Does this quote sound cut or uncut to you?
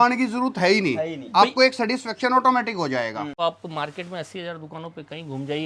cut